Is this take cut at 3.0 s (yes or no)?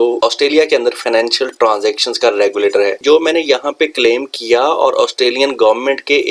yes